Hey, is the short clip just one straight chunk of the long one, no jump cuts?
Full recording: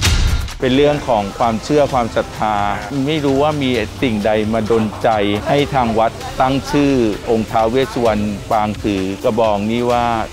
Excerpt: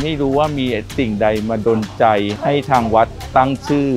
yes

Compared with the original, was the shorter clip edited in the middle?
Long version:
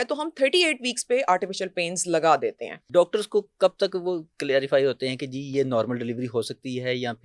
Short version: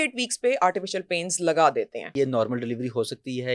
yes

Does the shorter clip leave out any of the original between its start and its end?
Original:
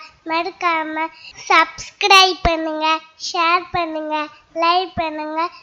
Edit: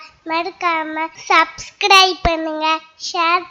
yes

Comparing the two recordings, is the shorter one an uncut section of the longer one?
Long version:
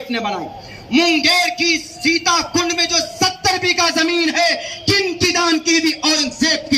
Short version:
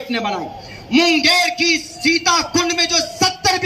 yes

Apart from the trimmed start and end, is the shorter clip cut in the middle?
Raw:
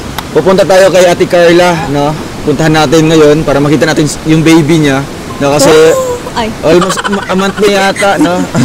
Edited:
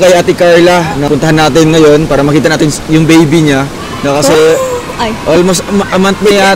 yes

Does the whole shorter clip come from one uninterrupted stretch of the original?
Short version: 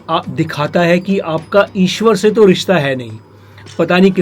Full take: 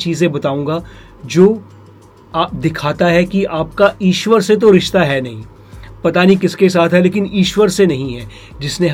yes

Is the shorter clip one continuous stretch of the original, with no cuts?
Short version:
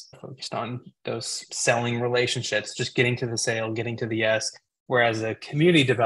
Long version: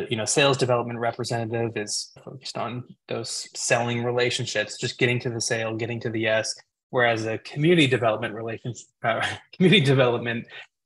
yes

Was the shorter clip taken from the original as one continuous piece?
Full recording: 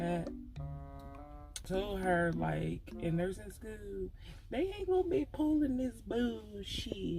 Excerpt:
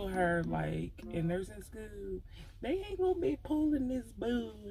yes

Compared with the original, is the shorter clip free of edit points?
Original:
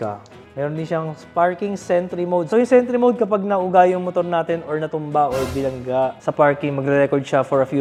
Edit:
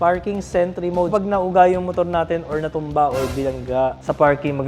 no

